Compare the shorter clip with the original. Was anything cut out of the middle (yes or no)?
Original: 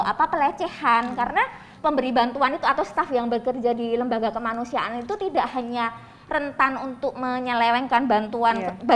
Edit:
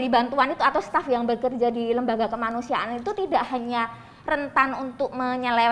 no